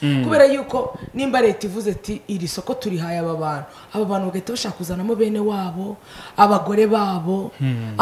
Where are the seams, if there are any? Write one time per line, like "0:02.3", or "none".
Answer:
none